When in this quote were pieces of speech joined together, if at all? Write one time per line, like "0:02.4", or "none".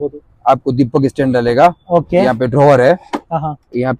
none